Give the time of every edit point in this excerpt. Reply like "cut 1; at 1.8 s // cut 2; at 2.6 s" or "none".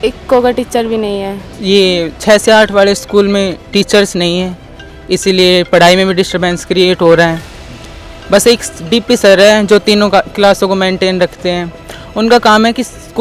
cut 1; at 1.4 s